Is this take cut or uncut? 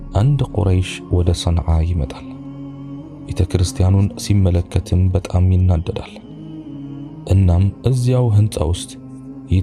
cut